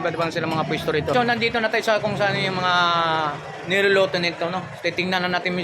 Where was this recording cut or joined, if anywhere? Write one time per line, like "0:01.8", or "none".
0:01.1